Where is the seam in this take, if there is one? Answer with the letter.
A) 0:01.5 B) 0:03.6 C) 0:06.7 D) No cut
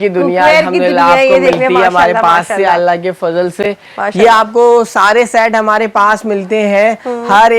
D